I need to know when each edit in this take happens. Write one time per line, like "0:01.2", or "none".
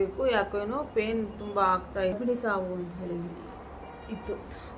0:02.1